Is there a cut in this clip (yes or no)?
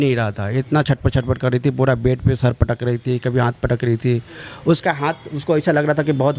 no